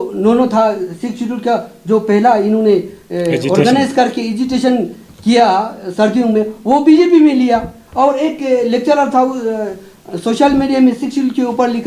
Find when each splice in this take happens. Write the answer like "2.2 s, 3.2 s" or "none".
none